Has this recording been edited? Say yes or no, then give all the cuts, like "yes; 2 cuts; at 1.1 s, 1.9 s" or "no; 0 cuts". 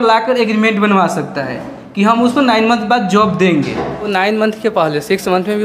yes; 1 cut; at 4.1 s